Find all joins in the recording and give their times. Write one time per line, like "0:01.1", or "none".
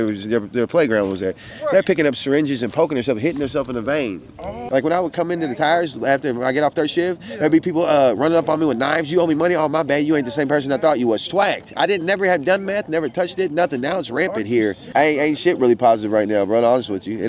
0:04.6
0:14.9